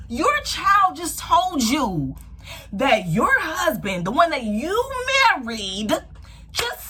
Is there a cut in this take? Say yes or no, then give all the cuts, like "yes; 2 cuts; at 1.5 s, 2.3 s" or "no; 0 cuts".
no; 0 cuts